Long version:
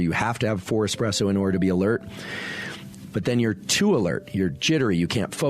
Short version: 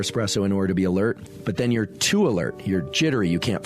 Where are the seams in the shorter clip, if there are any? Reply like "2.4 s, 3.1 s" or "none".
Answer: 1.3 s

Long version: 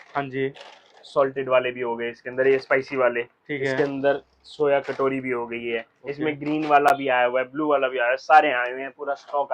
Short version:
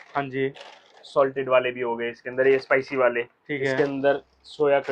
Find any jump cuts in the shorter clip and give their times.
none

